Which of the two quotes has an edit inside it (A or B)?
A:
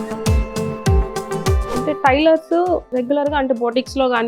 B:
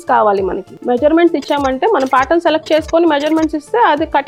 A